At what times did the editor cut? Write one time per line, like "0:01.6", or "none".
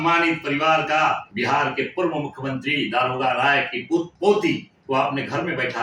0:01.3
0:04.1
0:04.7

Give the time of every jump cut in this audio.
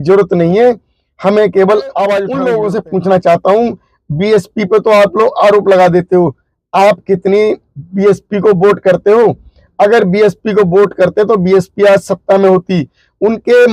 0:02.3

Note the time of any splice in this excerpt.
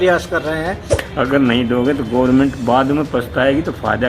0:01.0

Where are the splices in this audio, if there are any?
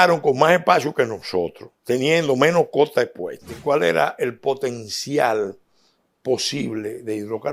0:03.5

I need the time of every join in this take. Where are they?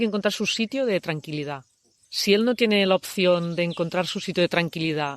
0:02.0

